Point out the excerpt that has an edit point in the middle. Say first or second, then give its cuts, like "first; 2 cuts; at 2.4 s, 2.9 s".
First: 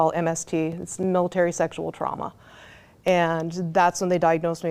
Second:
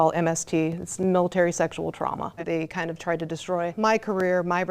second; 2 cuts; at 2.4 s, 3.7 s